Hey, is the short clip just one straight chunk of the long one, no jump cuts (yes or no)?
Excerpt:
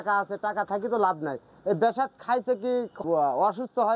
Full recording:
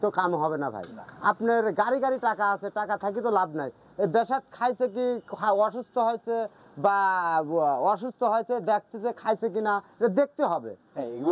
no